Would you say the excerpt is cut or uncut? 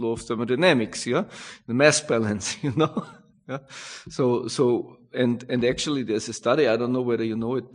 uncut